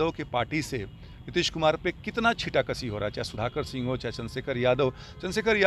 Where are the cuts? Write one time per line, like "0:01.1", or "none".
none